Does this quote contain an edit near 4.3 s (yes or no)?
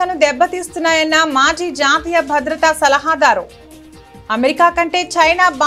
no